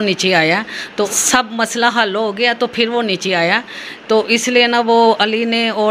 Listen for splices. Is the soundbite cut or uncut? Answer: cut